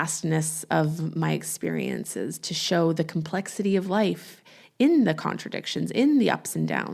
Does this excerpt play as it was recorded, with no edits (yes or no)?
yes